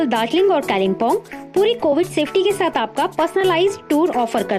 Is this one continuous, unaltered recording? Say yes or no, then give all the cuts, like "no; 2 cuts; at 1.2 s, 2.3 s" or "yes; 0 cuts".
yes; 0 cuts